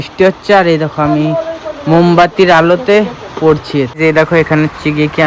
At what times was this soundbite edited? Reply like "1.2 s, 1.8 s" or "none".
3.9 s